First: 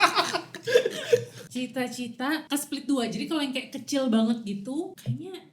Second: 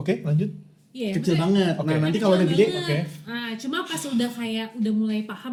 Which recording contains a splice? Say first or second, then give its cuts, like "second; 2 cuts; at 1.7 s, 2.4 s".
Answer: first; 2 cuts; at 1.4 s, 2.4 s